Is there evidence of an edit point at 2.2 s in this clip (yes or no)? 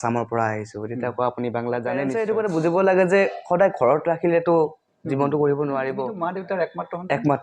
yes